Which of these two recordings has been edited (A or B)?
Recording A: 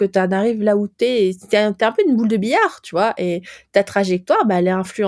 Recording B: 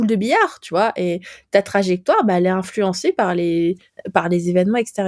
B